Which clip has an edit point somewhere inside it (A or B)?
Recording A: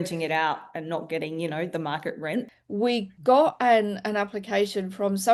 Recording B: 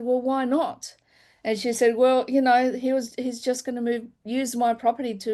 A